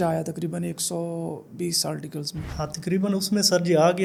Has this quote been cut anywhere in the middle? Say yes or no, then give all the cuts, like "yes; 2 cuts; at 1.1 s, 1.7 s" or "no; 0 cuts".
no; 0 cuts